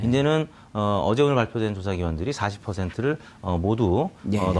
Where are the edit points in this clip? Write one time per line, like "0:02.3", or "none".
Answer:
0:03.3